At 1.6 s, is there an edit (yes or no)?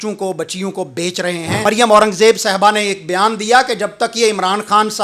yes